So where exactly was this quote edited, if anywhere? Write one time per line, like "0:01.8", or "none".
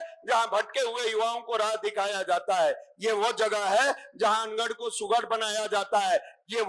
none